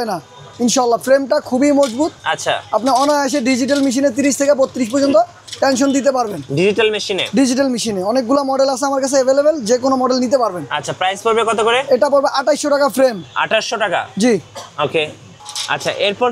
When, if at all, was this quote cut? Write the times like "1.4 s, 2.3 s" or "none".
none